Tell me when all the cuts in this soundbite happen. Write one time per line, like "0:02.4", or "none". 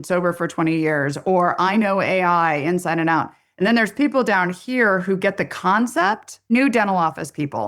0:06.3